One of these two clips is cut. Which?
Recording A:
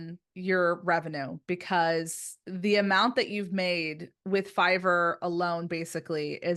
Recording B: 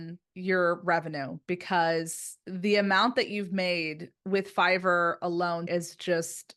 B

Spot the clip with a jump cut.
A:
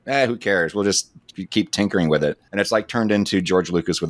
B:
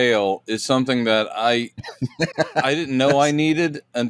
A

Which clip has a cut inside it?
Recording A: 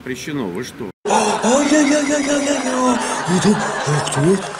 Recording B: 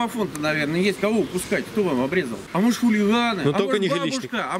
B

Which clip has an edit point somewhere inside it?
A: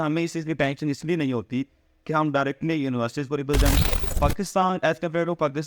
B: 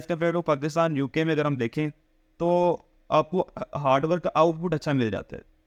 A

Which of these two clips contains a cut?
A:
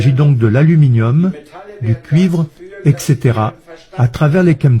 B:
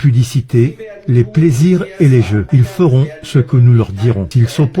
B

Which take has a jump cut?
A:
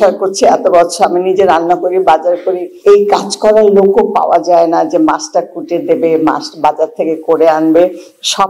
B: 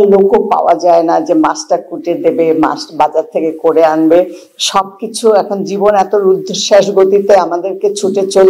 A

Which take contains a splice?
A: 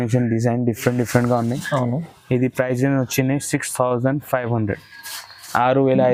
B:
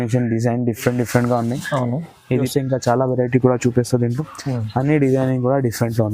B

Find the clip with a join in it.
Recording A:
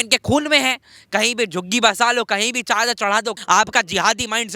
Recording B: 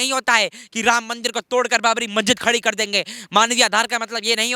A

